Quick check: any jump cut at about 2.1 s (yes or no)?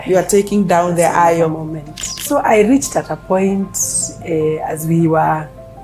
yes